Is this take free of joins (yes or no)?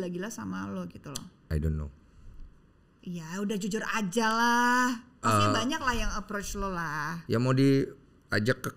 yes